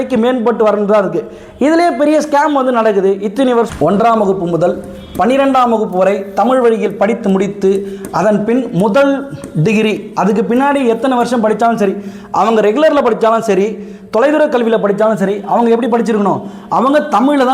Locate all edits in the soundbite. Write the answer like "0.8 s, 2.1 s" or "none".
3.7 s